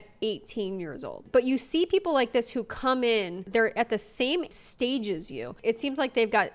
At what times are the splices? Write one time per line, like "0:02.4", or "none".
0:01.2